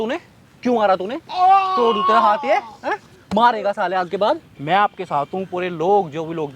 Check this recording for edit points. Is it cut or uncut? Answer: cut